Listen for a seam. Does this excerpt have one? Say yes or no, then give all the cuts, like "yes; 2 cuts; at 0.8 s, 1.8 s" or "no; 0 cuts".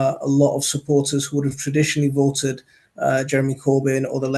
no; 0 cuts